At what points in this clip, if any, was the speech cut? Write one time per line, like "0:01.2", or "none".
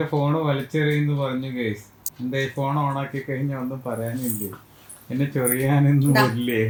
none